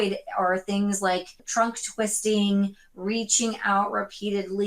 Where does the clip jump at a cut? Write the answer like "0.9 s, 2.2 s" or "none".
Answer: 1.4 s